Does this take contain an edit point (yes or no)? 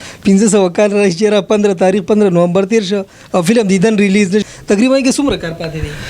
yes